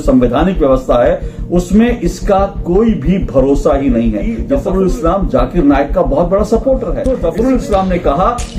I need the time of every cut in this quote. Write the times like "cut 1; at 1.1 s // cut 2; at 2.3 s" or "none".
cut 1; at 4.4 s // cut 2; at 6.9 s

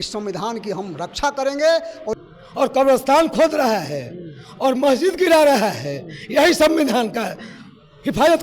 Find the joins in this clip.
cut 1; at 2.0 s

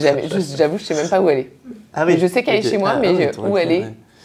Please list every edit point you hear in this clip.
none

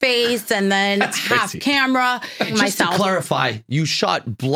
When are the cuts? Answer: cut 1; at 2.5 s

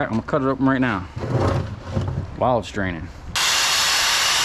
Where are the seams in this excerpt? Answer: cut 1; at 3.3 s

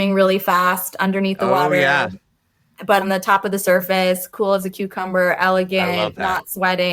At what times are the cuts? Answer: cut 1; at 3.0 s

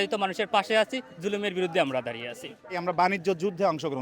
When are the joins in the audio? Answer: cut 1; at 2.8 s

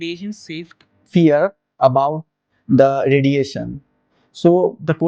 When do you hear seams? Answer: cut 1; at 1.1 s

